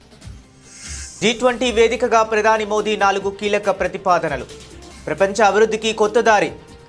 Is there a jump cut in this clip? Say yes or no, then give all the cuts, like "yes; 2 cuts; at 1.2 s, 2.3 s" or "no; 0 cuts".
no; 0 cuts